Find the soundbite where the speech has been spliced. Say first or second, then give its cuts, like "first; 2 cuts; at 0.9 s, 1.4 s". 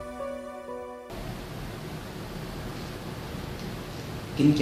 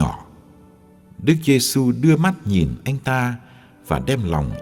second; 1 cut; at 1.7 s